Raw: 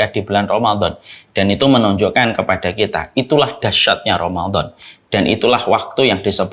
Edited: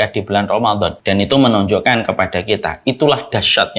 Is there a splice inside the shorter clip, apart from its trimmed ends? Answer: yes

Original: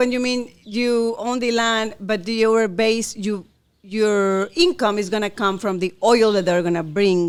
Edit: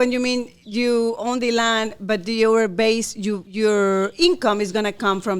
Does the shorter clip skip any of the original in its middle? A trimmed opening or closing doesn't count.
yes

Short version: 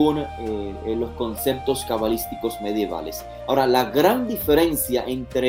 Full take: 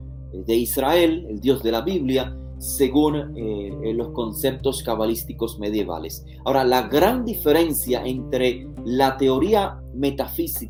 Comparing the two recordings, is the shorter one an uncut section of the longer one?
yes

